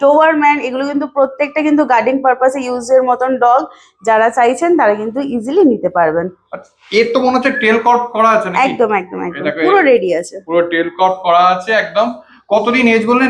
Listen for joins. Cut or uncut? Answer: uncut